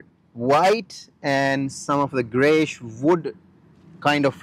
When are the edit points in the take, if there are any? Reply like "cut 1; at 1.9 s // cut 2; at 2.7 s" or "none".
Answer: none